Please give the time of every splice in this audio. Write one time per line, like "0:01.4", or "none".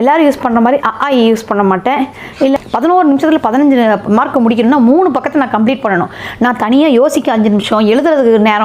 0:02.6